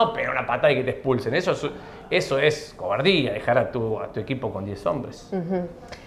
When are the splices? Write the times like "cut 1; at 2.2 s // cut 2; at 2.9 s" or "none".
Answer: none